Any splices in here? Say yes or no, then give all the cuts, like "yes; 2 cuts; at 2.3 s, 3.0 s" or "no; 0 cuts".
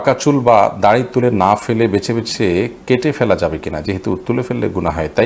no; 0 cuts